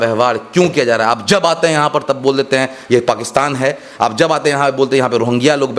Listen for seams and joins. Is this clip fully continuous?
yes; 0 cuts

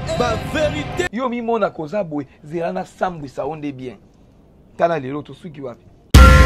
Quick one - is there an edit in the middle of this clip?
no; 0 cuts

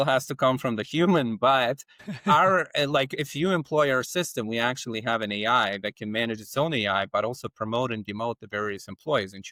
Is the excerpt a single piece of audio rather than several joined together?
yes; 0 cuts

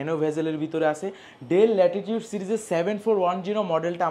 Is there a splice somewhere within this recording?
no; 0 cuts

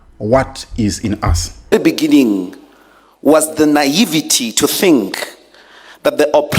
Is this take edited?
yes; 1 cut; at 1.7 s

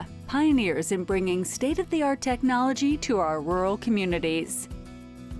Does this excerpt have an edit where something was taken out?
yes; 1 cut; at 4.5 s

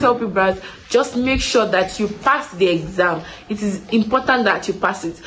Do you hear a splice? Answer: no; 0 cuts

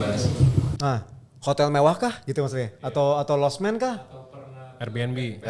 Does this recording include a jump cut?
no; 0 cuts

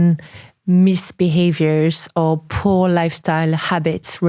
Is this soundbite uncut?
yes; 0 cuts

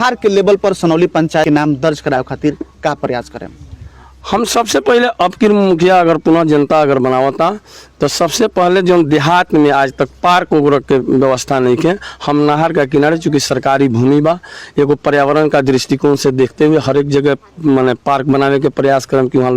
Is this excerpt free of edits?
no; 1 cut; at 1.5 s

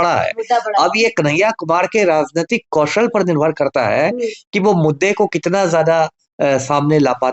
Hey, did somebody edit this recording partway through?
no; 0 cuts

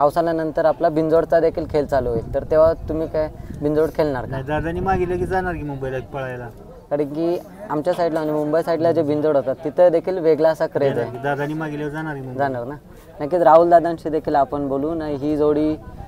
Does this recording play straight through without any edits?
yes; 0 cuts

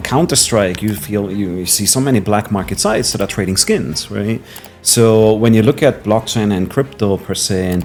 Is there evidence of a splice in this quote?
no; 0 cuts

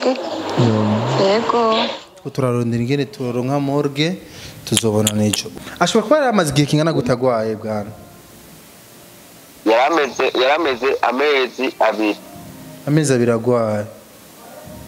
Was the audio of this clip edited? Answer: yes; 1 cut; at 5.5 s

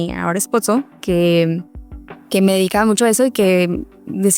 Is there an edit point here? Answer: no; 0 cuts

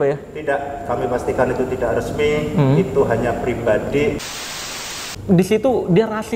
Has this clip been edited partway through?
yes; 1 cut; at 4.6 s

